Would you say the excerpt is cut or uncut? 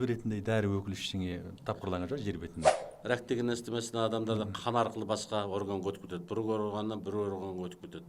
cut